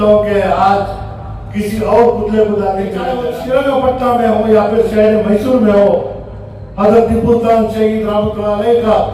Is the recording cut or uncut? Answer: cut